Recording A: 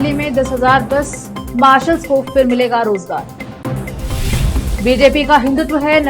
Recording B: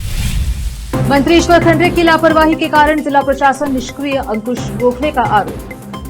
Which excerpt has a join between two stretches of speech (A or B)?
B